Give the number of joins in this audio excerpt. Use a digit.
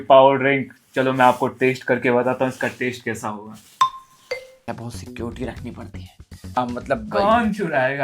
2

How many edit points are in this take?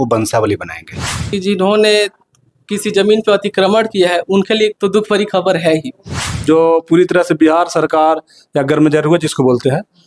2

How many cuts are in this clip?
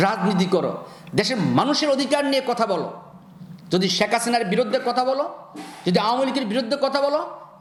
0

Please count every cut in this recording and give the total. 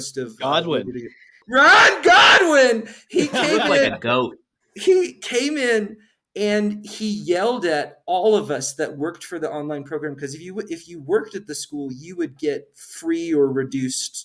1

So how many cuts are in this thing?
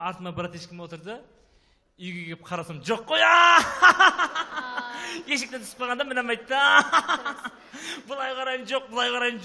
0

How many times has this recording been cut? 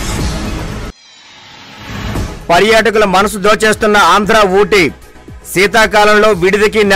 1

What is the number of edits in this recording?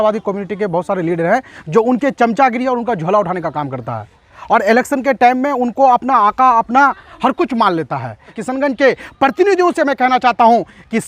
1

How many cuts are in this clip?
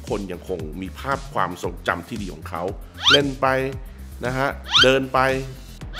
1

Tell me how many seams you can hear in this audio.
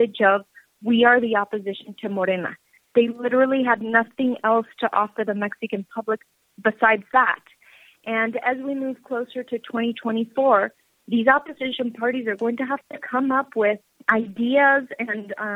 1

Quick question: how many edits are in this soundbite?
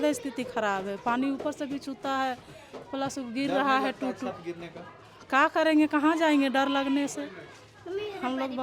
0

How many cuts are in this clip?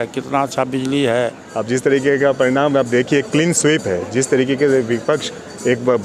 1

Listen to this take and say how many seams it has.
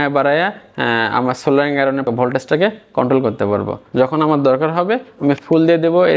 2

